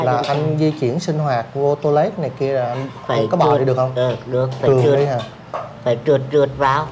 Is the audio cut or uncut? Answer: uncut